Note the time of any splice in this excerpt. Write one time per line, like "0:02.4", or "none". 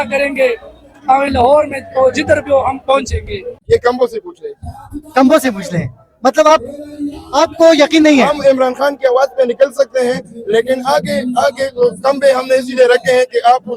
0:03.5